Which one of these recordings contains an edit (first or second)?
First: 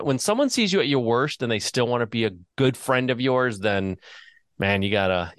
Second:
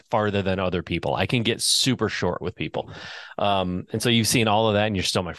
first